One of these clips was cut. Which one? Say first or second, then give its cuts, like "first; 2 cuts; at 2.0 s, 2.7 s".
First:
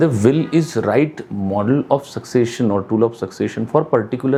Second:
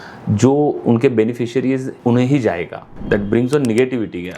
second; 2 cuts; at 1.9 s, 2.9 s